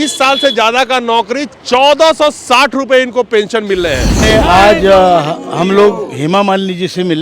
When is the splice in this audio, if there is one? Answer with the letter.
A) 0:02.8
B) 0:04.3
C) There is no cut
B